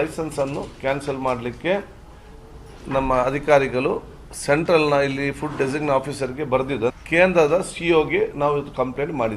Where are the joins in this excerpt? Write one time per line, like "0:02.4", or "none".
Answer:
0:06.9